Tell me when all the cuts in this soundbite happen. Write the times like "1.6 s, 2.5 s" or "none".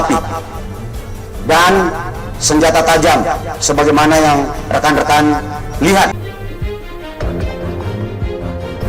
6.1 s